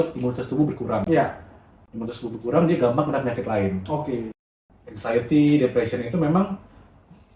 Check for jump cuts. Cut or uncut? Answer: cut